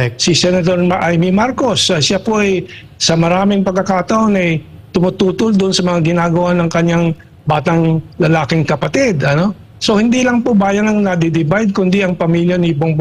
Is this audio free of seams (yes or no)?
yes